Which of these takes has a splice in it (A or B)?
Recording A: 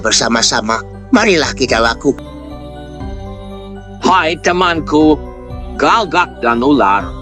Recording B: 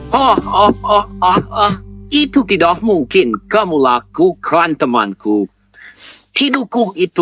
A